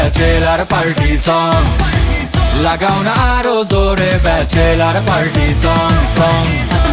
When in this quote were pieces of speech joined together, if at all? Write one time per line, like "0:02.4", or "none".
none